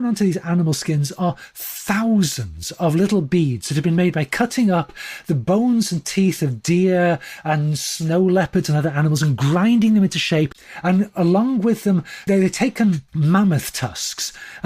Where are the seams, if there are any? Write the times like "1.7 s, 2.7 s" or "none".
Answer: 10.6 s, 12.2 s, 13.1 s